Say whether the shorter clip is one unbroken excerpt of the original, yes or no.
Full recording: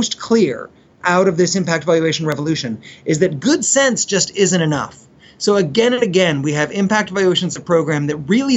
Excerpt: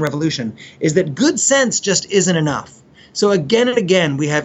yes